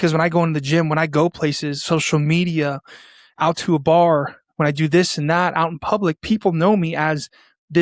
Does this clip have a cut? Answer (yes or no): no